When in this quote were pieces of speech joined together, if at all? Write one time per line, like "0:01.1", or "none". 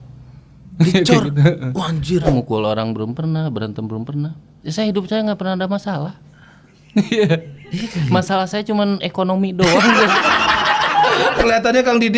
0:02.3
0:11.4